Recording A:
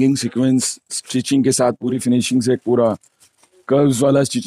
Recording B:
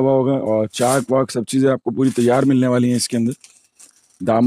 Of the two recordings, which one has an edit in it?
A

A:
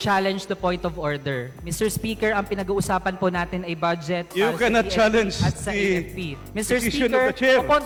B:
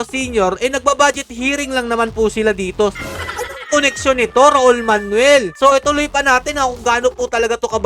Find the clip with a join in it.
B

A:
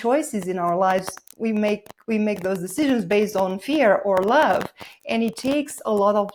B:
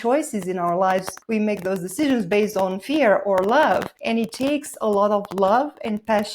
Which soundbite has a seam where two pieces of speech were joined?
B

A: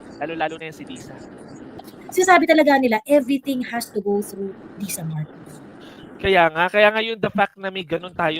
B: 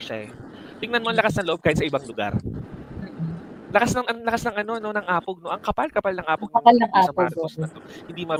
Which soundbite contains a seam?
A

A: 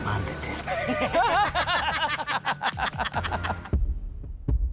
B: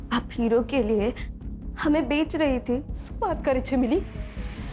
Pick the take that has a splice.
A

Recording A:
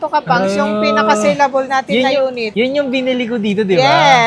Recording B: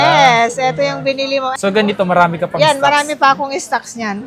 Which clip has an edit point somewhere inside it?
B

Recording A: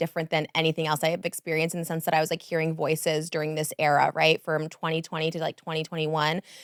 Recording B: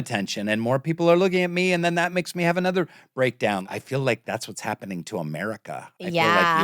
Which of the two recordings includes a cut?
B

